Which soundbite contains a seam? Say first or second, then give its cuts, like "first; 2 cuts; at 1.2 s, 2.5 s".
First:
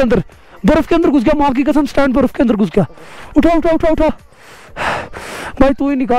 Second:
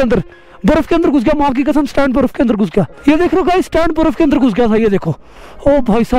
second; 1 cut; at 2.9 s